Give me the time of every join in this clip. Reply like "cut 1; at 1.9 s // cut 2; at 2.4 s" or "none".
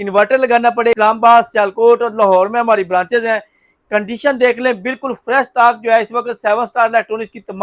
cut 1; at 1.0 s